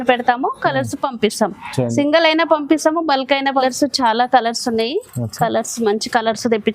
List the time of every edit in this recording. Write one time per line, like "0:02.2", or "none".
0:03.6